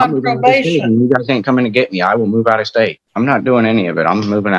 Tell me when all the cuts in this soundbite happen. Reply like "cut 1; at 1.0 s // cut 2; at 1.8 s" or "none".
cut 1; at 3.0 s